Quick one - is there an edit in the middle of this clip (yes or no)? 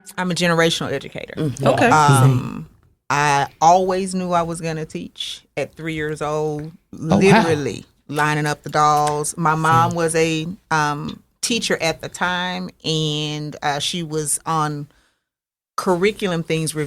no